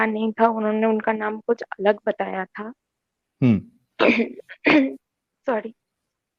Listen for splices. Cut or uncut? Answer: uncut